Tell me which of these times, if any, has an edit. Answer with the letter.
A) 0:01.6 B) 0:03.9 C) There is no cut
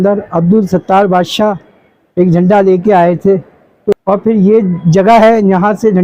B